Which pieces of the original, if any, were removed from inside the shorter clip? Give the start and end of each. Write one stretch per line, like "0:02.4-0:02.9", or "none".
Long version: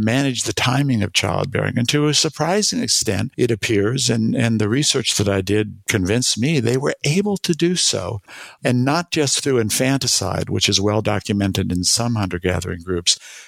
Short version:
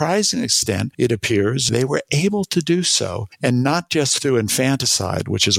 0:04.1-0:06.6
0:08.2-0:08.5